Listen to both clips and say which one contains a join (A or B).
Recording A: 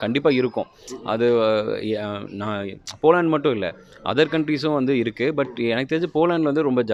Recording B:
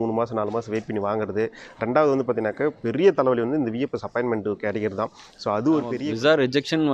B